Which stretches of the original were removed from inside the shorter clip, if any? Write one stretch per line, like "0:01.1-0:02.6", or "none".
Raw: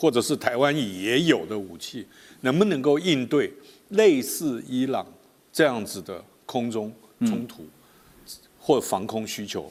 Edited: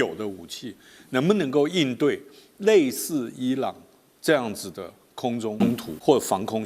0:07.0-0:08.3